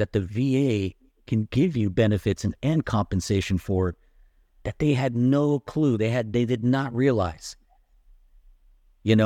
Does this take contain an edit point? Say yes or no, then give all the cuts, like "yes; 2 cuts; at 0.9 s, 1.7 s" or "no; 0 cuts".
no; 0 cuts